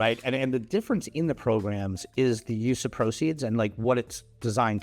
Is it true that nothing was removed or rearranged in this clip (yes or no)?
yes